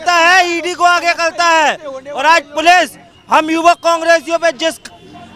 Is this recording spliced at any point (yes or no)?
no